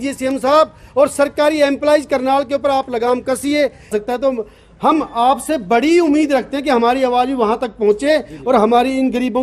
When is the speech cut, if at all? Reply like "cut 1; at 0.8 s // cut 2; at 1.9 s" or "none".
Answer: cut 1; at 3.9 s